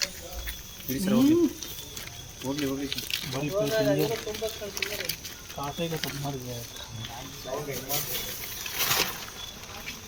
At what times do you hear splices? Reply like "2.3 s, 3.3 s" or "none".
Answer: none